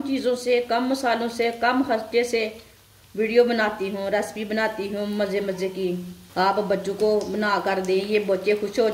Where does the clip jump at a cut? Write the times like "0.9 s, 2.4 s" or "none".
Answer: 6.2 s